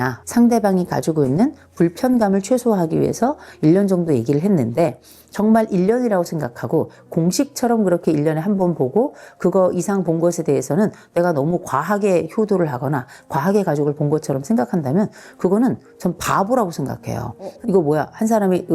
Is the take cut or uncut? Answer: cut